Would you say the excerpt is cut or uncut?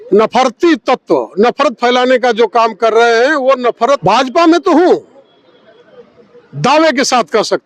cut